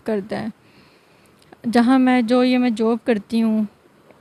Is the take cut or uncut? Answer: uncut